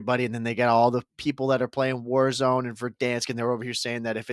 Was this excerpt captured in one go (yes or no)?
yes